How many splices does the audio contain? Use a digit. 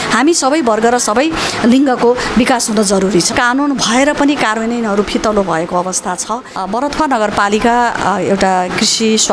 2